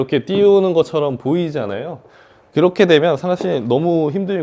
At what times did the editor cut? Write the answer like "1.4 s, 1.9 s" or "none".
none